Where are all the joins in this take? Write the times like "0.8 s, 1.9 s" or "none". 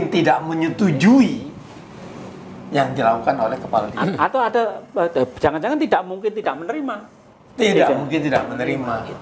3.9 s

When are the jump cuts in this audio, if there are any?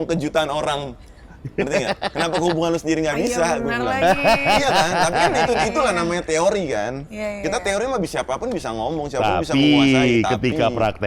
none

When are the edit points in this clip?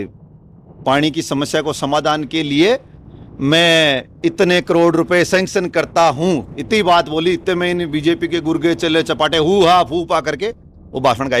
none

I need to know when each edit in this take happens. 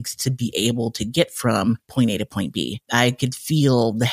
2.8 s

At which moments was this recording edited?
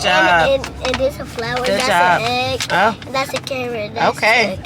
none

